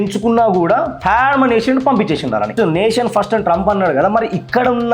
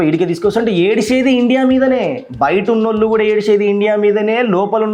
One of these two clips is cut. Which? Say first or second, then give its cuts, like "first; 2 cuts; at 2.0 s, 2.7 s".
first; 1 cut; at 2.5 s